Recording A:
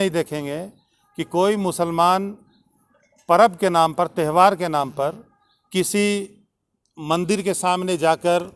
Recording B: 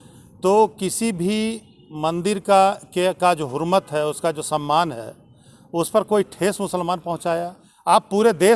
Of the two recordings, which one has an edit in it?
B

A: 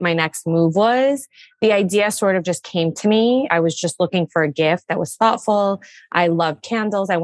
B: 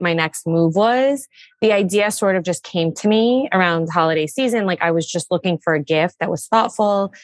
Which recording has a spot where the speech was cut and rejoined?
A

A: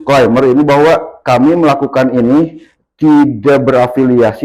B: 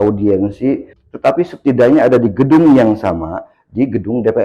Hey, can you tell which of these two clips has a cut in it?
B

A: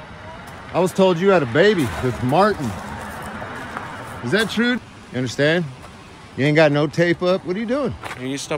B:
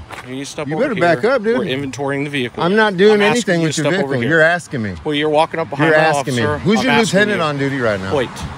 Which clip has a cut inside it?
A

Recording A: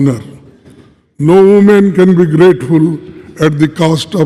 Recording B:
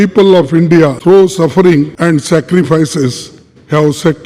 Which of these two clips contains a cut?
B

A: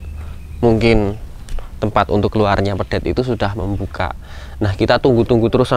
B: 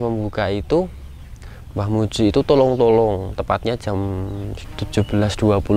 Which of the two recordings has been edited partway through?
B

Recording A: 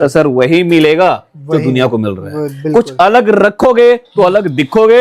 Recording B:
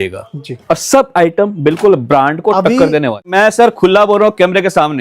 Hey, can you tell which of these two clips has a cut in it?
B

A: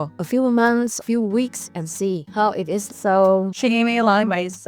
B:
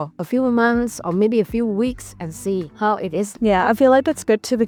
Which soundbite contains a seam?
A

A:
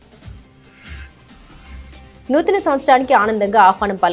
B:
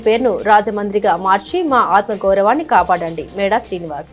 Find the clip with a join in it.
A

